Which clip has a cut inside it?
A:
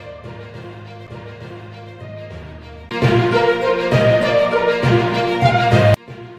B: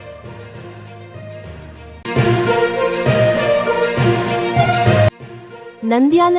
B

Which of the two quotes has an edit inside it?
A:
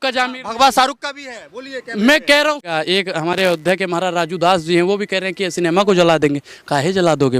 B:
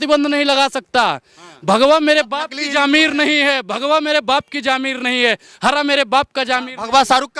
A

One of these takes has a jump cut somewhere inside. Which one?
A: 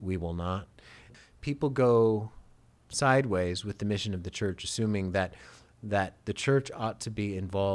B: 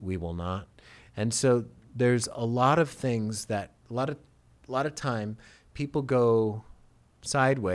A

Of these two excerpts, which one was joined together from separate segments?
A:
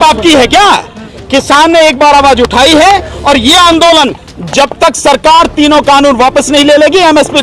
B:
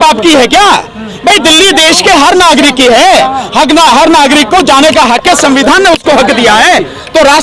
A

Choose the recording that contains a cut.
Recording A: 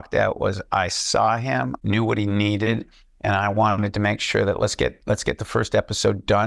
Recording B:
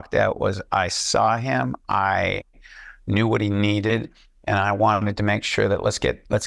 A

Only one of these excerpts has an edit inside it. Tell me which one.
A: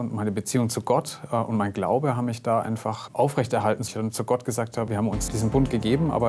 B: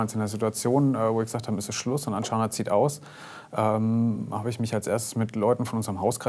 A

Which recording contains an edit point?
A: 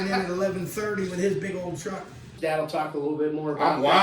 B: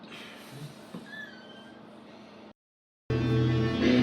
B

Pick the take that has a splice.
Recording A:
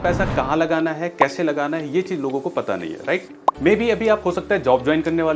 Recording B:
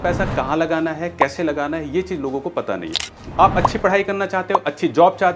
B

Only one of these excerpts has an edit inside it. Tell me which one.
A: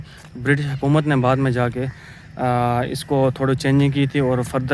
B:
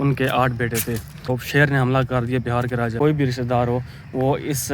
B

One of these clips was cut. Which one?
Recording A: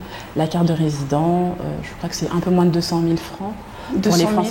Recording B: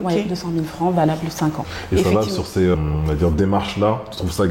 B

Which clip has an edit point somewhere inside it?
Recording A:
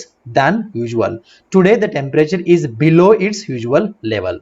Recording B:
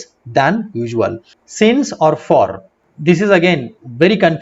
B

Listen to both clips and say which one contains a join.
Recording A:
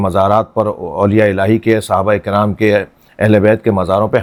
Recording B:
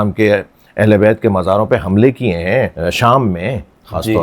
B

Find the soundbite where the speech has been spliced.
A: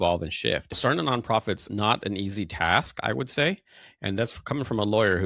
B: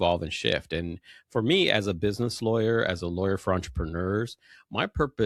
A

